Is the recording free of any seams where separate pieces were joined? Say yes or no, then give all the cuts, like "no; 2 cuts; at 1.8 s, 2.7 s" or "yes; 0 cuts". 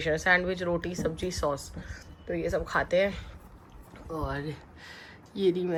yes; 0 cuts